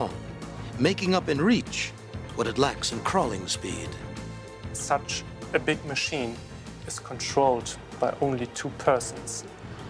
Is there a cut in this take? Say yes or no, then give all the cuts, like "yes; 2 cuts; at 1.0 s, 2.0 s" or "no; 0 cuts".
no; 0 cuts